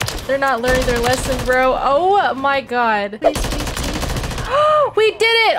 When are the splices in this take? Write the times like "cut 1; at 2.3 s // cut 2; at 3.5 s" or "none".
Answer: cut 1; at 3.2 s